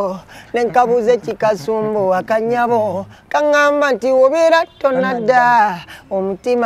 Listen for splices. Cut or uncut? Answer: uncut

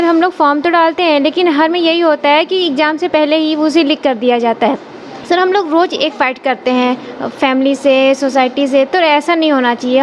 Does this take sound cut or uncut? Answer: uncut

